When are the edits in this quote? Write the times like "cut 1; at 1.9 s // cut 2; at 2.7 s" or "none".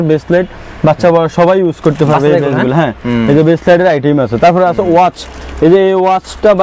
none